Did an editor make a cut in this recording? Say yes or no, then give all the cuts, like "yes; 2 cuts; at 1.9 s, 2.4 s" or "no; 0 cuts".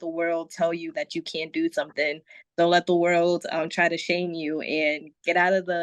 no; 0 cuts